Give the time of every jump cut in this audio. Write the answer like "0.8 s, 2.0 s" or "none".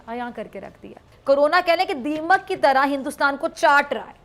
1.1 s